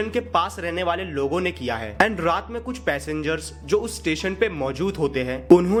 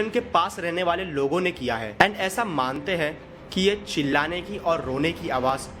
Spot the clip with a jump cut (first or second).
second